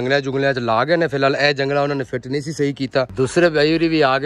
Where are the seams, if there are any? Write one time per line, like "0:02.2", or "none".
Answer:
0:03.1